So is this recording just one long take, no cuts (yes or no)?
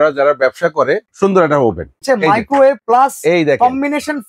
no